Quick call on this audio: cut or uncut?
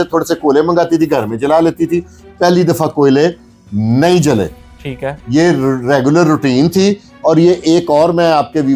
uncut